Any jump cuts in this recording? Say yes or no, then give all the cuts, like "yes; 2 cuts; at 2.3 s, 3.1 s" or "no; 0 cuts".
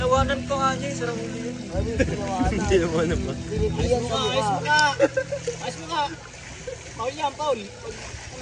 no; 0 cuts